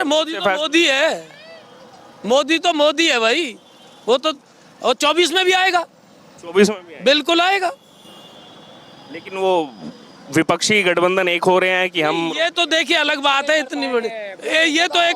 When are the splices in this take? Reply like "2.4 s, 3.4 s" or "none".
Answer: none